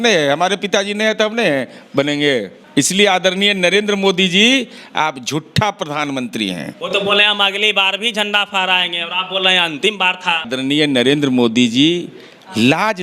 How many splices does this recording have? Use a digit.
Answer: 3